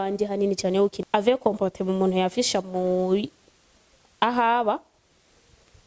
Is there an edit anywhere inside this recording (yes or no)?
yes